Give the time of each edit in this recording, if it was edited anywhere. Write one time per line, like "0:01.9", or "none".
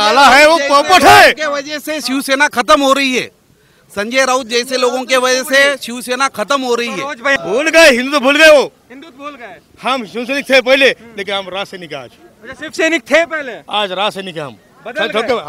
0:07.3